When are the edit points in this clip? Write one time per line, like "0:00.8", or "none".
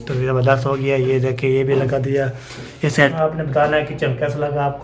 0:03.1